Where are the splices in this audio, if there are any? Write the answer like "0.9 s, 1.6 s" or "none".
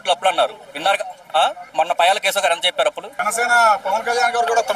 1.6 s, 3.1 s